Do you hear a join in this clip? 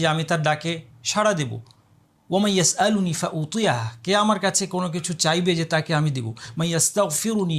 no; 0 cuts

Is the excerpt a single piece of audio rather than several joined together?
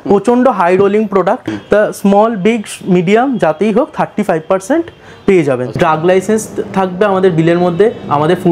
no; 2 cuts; at 1.5 s, 5.7 s

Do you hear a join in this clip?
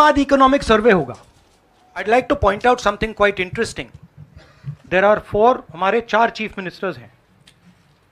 yes; 1 cut; at 2.0 s

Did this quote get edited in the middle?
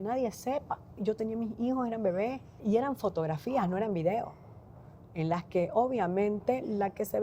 yes; 2 cuts; at 1.0 s, 2.6 s

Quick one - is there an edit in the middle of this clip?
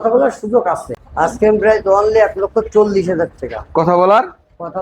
yes; 1 cut; at 1.0 s

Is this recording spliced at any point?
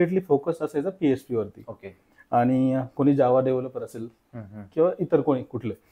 no; 0 cuts

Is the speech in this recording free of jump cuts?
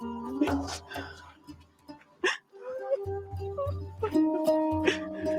yes; 0 cuts

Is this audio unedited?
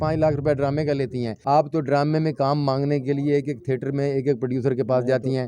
no; 1 cut; at 1.3 s

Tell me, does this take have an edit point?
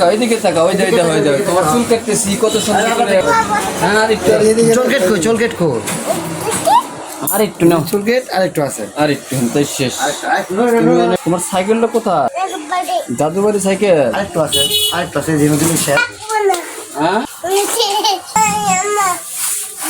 yes; 1 cut; at 18.3 s

